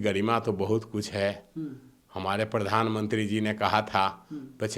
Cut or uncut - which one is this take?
uncut